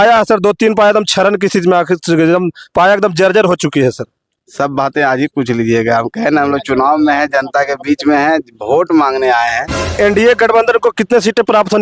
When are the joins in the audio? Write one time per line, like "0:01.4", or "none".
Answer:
0:09.9